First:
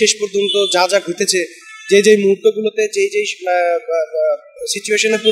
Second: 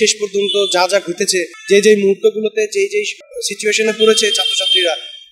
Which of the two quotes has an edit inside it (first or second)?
second